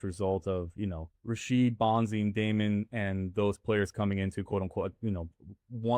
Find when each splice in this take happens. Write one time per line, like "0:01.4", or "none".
0:01.1